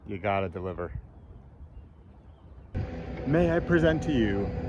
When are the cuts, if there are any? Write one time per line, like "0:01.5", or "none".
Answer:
0:02.8